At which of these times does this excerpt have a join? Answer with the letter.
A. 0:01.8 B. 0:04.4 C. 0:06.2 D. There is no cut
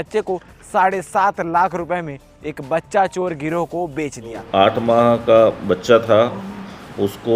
B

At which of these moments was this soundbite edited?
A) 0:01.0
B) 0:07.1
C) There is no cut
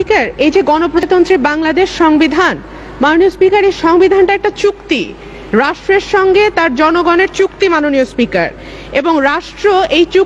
A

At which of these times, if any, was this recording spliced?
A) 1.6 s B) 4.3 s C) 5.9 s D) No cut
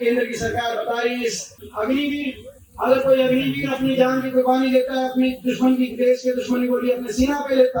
D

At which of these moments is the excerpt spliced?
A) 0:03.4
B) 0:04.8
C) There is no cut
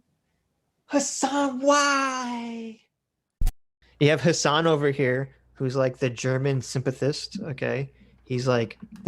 A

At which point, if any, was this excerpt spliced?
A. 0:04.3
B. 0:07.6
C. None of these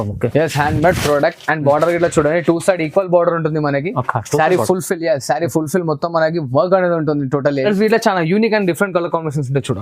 B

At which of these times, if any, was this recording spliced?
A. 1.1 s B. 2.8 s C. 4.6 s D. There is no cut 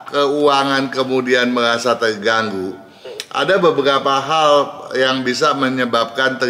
D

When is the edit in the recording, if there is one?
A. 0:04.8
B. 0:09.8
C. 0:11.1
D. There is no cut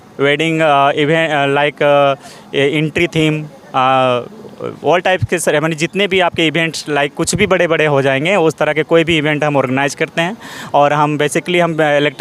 D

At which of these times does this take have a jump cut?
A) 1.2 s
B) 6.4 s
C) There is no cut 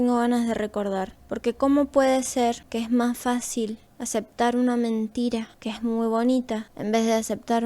A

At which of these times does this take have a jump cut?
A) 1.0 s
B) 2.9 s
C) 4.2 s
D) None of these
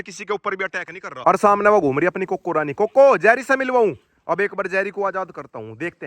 A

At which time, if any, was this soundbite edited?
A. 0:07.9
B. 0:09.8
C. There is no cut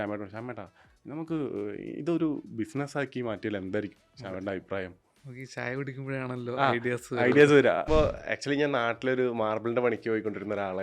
A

